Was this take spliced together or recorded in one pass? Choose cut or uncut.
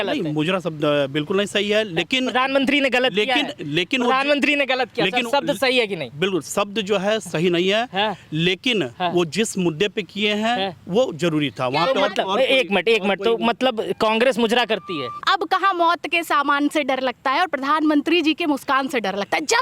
cut